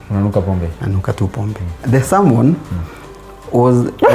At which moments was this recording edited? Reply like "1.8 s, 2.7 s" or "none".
1.8 s